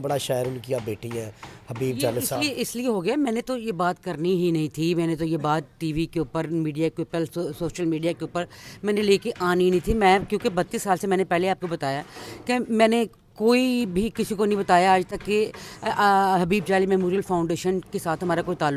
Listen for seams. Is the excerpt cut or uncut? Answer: uncut